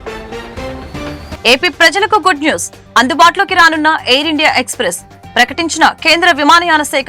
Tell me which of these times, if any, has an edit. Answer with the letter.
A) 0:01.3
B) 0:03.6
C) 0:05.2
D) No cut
A